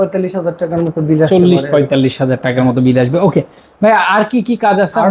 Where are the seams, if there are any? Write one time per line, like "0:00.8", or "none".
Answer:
none